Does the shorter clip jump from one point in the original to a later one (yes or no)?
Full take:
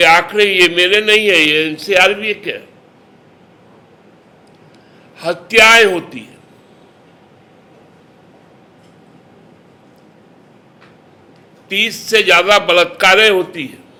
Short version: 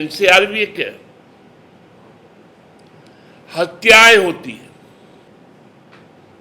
yes